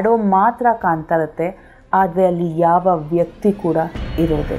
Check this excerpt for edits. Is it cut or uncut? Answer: uncut